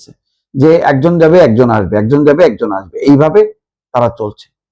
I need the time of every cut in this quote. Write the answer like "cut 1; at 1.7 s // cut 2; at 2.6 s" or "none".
none